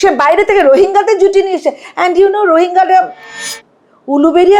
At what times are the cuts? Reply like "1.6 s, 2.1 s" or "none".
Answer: 3.5 s